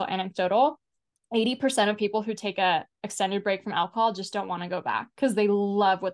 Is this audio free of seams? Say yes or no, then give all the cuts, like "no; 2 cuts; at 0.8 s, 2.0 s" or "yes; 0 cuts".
yes; 0 cuts